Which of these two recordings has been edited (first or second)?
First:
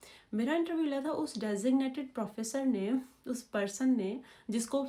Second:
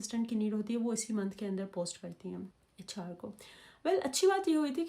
second